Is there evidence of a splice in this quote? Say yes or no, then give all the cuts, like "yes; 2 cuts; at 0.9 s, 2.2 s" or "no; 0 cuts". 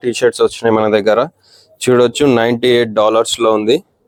no; 0 cuts